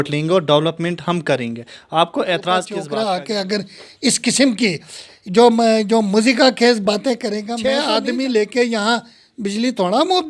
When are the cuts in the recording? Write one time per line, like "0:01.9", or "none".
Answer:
0:02.8
0:07.5